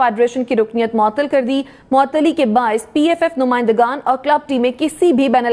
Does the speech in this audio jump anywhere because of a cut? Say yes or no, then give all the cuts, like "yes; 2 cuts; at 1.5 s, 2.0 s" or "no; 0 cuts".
no; 0 cuts